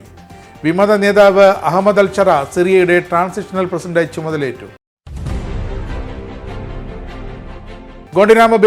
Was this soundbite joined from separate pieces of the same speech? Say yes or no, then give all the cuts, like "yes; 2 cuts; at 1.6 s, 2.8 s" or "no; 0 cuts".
no; 0 cuts